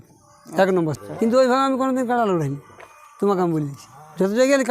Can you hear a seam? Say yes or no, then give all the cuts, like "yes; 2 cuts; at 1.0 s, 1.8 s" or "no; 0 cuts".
yes; 1 cut; at 0.9 s